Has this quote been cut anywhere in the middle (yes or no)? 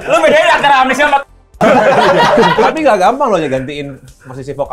yes